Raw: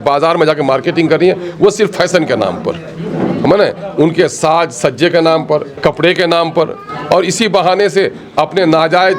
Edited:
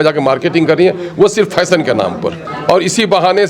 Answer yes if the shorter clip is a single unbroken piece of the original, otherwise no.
no